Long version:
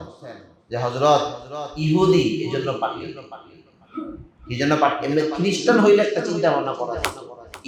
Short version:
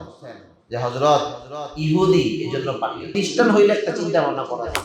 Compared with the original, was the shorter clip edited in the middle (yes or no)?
yes